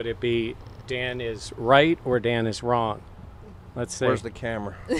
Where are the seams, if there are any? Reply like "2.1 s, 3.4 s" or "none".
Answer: none